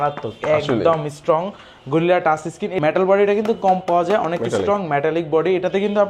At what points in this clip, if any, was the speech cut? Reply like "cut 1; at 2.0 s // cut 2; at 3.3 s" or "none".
cut 1; at 2.7 s